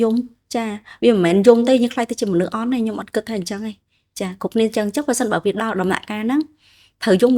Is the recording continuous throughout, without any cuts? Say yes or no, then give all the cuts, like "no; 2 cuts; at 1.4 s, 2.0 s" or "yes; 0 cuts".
yes; 0 cuts